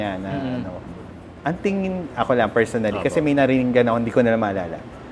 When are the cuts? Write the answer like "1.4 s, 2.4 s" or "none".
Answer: 1.3 s